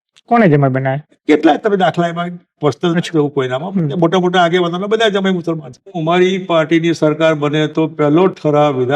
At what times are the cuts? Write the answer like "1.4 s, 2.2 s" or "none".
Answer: 5.9 s